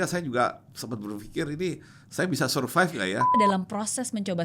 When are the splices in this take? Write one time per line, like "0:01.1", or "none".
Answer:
0:03.3